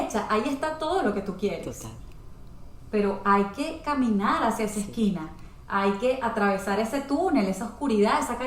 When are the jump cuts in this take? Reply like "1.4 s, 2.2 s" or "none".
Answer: none